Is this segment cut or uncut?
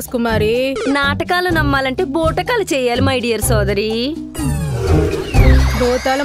uncut